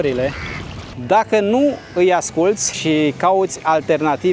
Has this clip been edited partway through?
yes; 2 cuts; at 1.0 s, 2.7 s

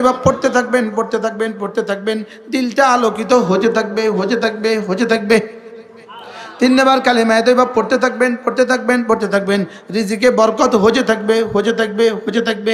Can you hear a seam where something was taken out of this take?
no; 0 cuts

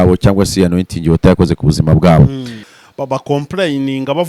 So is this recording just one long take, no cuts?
no; 1 cut; at 2.7 s

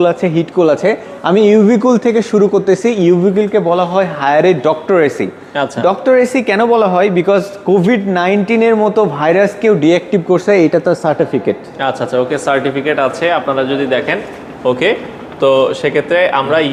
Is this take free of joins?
yes; 0 cuts

